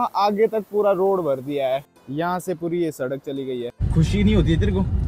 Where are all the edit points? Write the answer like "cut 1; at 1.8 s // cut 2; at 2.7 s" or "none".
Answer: cut 1; at 1.9 s // cut 2; at 3.8 s